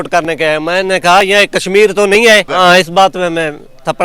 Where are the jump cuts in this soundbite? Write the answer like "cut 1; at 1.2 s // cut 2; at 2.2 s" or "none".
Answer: cut 1; at 2.5 s